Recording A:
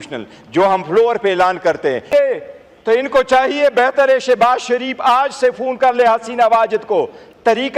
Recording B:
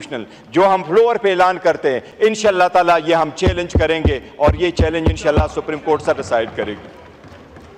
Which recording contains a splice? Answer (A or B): A